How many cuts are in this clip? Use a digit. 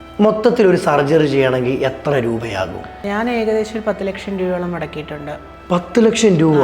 1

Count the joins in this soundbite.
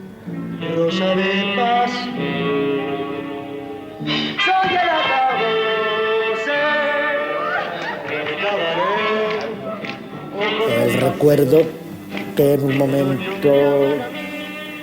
1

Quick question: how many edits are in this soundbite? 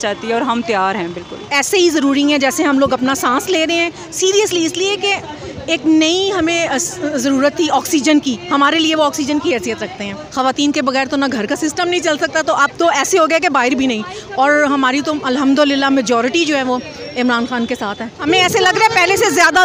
3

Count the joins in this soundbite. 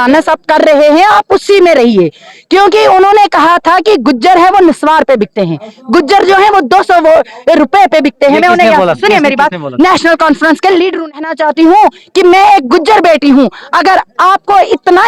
1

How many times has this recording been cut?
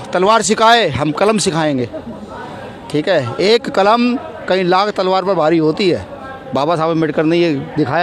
0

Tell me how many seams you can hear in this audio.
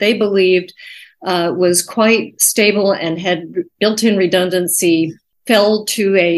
1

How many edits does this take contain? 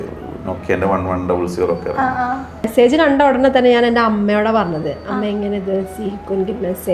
1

